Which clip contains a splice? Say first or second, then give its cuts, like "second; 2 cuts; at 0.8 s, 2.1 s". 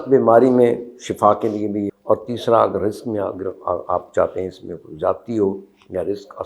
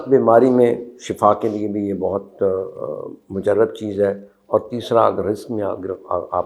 first; 1 cut; at 1.9 s